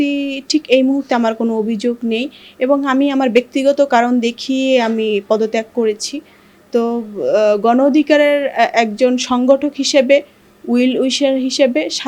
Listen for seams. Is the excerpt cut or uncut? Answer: uncut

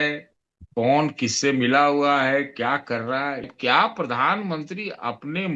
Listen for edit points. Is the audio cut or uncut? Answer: cut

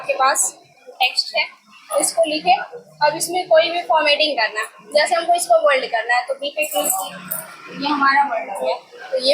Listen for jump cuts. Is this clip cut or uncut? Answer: uncut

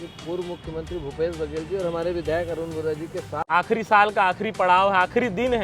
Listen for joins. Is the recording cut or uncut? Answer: cut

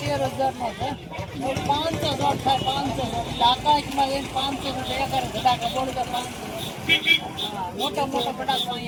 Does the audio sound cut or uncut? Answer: uncut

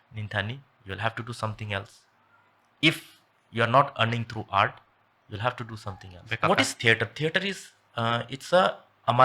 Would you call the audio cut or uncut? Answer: cut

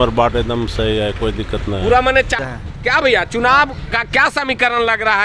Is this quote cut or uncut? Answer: cut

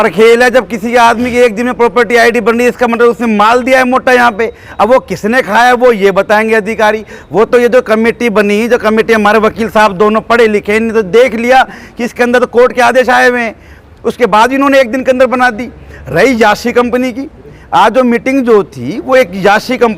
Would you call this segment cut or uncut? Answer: uncut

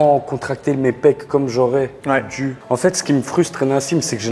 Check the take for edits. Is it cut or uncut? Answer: cut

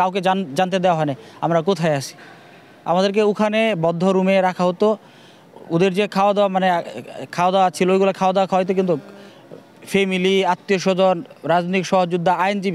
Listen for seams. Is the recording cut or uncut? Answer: uncut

